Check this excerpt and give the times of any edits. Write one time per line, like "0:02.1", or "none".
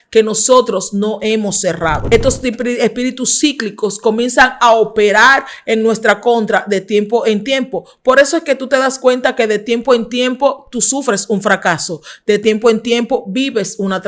0:02.0